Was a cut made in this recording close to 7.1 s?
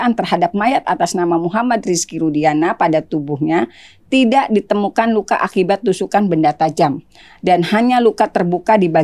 no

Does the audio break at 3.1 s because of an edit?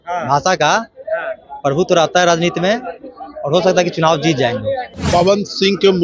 no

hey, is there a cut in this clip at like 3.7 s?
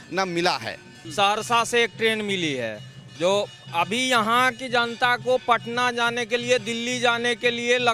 no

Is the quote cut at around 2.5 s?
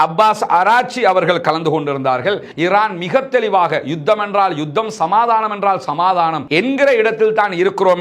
yes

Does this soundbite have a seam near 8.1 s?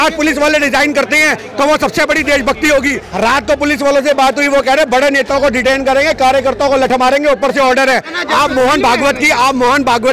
yes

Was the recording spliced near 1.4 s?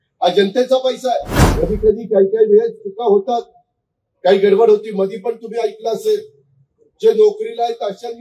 yes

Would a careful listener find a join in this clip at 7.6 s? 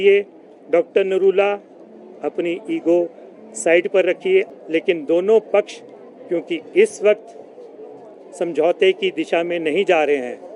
no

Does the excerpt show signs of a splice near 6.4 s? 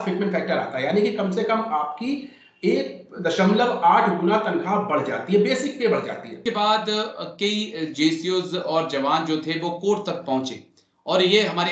yes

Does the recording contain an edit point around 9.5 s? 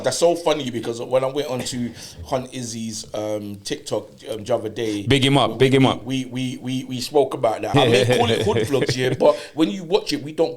no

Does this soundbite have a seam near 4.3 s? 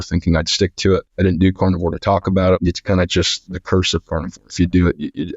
no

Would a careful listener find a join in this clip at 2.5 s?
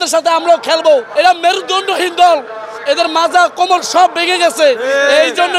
no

